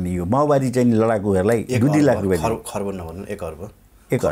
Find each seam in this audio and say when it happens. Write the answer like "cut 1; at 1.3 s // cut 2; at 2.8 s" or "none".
none

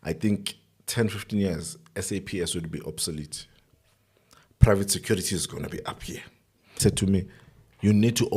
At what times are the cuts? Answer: cut 1; at 6.8 s

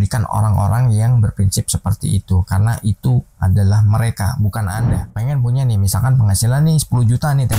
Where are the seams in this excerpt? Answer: cut 1; at 5.1 s

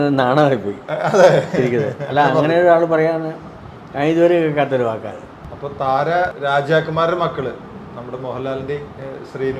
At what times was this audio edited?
none

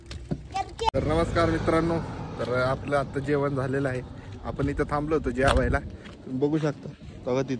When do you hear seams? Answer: cut 1; at 0.9 s

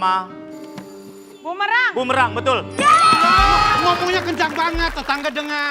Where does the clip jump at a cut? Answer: cut 1; at 3.8 s

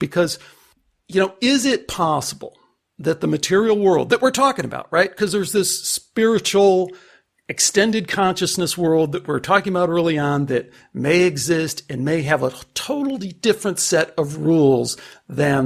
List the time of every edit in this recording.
none

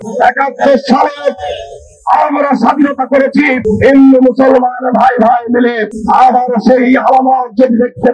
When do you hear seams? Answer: none

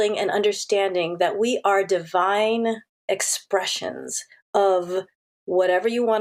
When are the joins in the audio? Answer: none

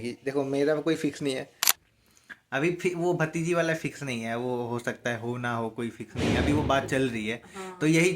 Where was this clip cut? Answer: cut 1; at 1.6 s

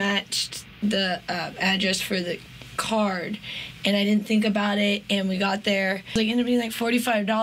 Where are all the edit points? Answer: cut 1; at 6.2 s

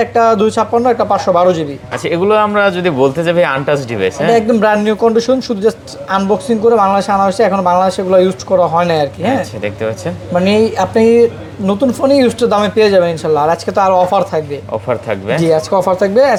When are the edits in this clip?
none

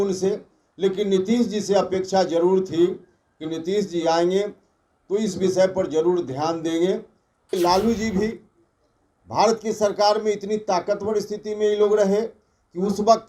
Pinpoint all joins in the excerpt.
cut 1; at 7.5 s

